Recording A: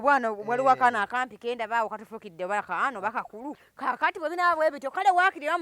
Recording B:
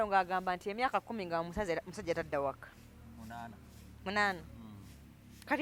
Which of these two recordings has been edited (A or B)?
A